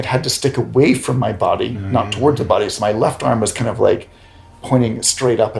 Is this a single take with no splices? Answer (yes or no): yes